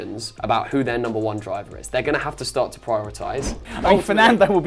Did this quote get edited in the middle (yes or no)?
yes